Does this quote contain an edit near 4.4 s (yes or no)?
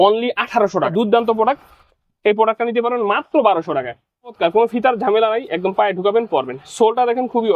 yes